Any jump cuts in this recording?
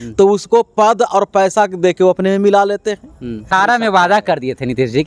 yes; 1 cut; at 3.5 s

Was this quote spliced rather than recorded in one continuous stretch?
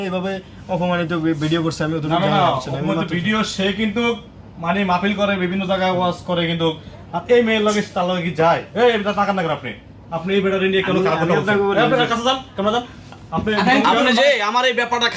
no; 0 cuts

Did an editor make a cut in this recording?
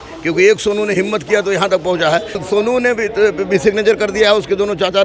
yes; 1 cut; at 2.4 s

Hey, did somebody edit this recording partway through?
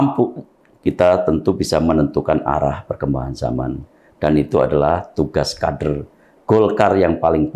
no; 0 cuts

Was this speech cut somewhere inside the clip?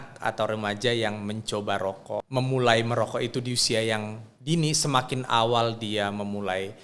yes; 1 cut; at 2.3 s

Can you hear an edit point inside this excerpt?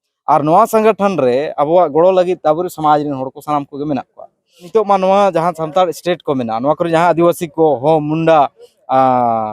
yes; 1 cut; at 4.5 s

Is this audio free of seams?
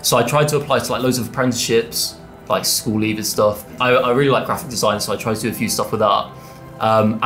no; 1 cut; at 3.8 s

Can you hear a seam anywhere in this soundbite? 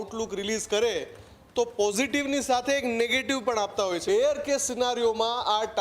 yes; 1 cut; at 4.0 s

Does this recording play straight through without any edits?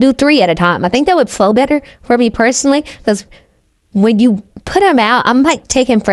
yes; 0 cuts

